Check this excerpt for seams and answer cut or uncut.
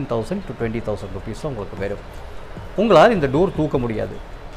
uncut